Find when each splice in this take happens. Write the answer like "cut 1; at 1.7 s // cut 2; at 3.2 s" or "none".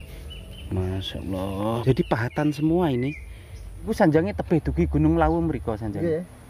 cut 1; at 1.8 s // cut 2; at 3.9 s